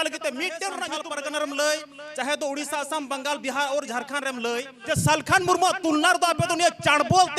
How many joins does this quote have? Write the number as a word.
two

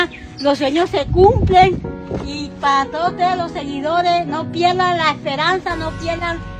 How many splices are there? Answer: zero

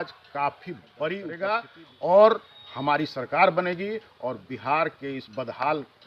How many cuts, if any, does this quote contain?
one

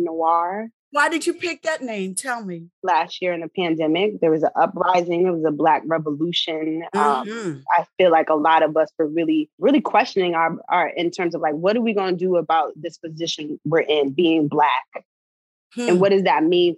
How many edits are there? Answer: three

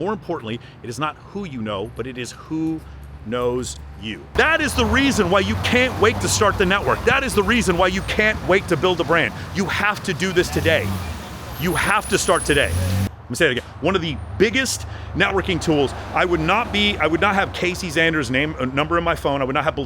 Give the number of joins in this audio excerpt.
two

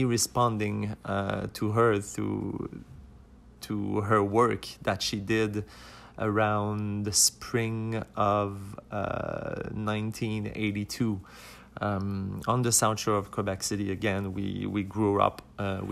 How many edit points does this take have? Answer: zero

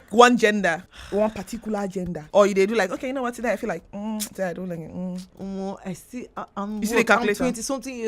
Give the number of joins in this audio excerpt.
three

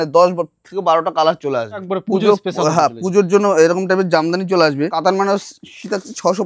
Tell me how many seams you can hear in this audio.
two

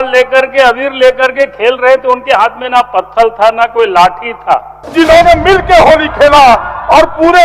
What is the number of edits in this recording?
one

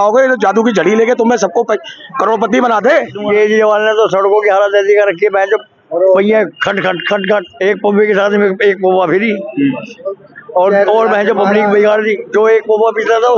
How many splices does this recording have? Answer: three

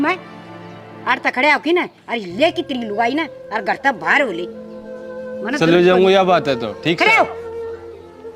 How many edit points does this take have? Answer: one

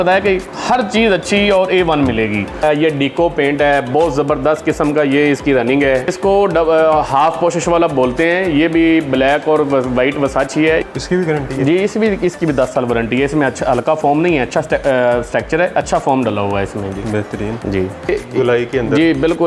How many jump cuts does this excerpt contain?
four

